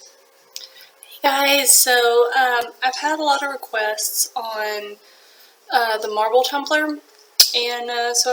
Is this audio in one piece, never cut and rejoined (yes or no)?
yes